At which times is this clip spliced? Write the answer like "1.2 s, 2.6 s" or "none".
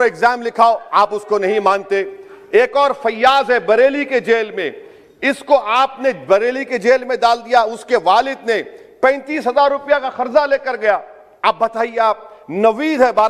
none